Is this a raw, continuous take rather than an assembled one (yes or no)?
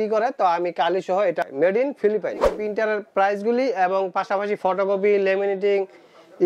no